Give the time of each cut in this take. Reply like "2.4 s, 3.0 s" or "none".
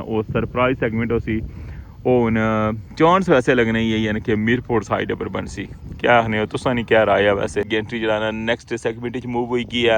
7.7 s